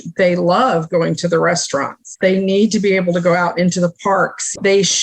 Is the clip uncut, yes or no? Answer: no